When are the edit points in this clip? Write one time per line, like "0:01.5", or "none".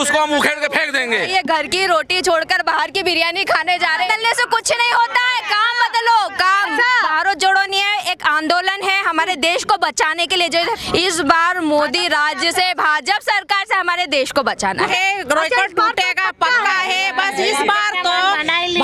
0:01.2
0:04.1
0:07.1
0:10.7
0:14.8